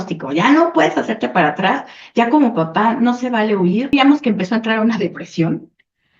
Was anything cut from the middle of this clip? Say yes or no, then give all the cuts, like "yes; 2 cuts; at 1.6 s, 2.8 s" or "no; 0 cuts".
yes; 1 cut; at 3.9 s